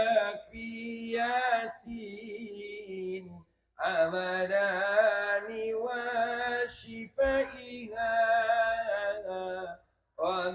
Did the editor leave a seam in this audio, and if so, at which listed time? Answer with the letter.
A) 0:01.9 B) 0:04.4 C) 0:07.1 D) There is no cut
D